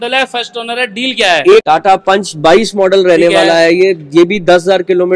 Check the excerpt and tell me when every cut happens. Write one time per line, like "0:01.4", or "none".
0:01.6